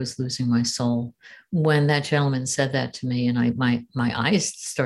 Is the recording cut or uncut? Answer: uncut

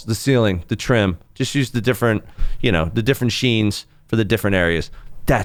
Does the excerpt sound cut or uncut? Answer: uncut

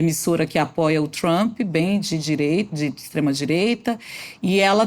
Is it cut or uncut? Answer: uncut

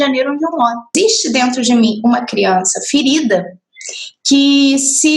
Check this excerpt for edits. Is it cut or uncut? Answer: cut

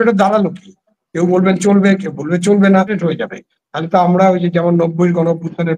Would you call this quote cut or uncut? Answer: cut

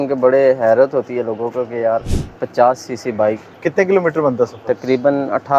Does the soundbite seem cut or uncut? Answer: cut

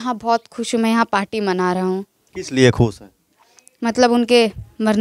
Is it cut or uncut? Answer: uncut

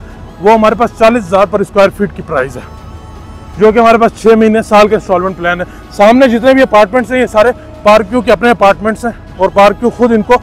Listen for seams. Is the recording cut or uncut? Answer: uncut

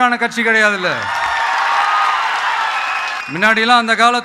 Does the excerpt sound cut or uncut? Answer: cut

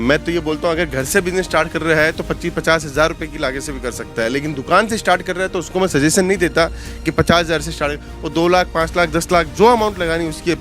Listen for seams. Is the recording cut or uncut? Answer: cut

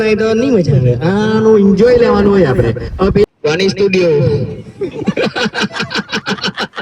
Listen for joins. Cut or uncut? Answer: cut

